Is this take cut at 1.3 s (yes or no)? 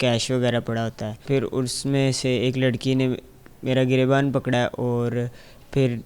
yes